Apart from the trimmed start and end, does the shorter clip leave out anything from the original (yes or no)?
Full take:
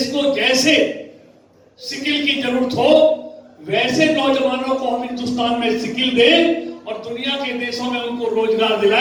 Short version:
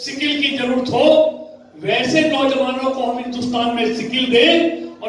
no